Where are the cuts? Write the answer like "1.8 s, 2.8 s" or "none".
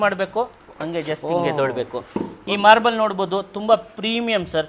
none